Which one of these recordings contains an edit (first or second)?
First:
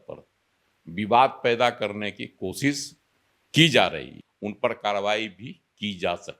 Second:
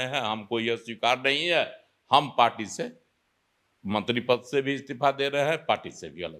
first